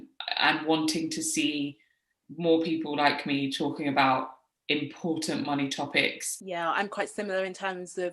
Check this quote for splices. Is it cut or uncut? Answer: cut